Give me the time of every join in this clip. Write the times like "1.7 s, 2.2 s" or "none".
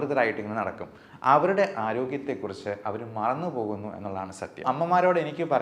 4.6 s